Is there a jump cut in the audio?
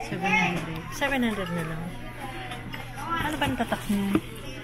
no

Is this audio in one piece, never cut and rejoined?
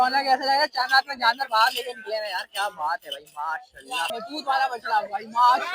no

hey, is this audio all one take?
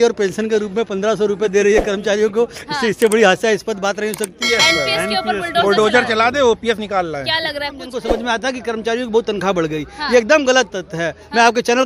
no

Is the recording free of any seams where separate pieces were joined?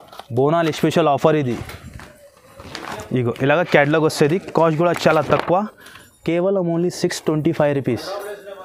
yes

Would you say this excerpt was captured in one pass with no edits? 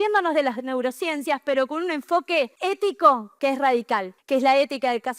no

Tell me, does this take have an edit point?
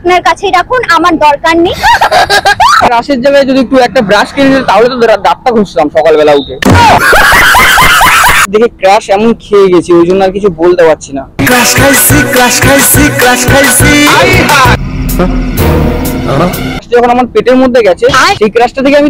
yes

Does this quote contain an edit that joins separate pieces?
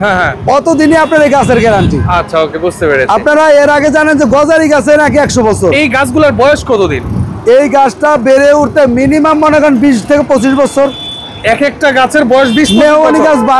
no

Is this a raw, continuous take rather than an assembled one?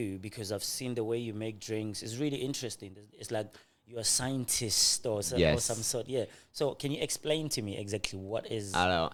yes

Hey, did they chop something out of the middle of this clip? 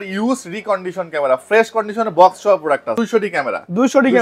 yes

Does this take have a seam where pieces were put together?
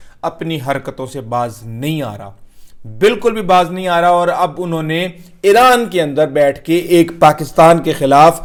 no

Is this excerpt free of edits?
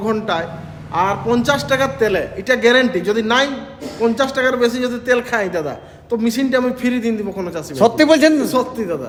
yes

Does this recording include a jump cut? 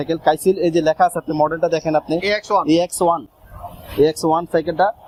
no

